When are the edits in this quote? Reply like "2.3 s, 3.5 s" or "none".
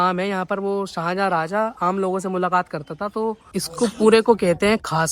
3.4 s